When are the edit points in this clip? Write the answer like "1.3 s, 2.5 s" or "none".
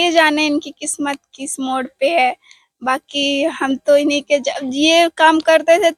none